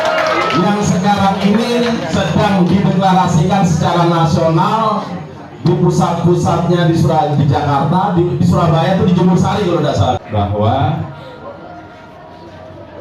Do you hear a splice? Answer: yes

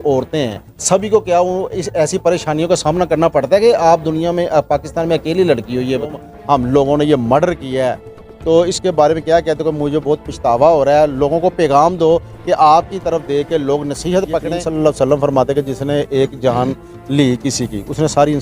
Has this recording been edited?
yes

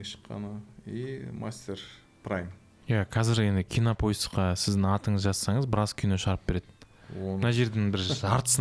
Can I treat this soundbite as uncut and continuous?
no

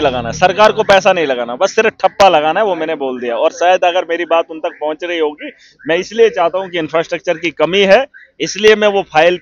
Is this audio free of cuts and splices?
yes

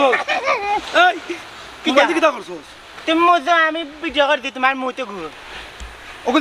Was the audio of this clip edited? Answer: no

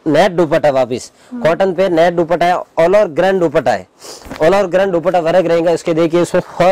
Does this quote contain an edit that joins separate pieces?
no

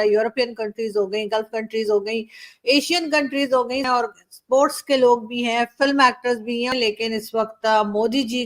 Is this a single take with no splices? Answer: no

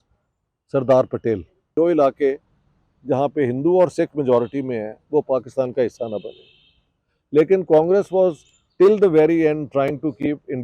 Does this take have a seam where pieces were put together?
yes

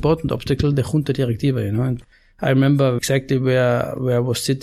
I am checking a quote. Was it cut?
yes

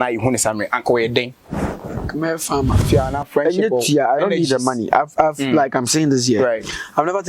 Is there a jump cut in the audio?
yes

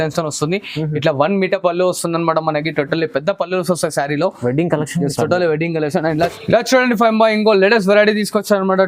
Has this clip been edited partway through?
yes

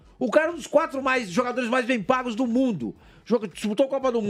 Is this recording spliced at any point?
no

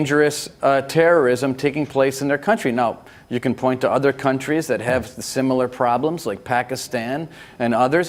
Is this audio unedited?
yes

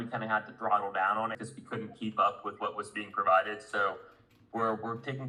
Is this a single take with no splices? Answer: yes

